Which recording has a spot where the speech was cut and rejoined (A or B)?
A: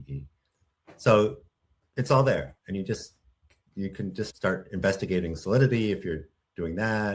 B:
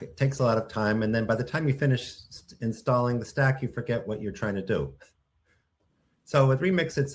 A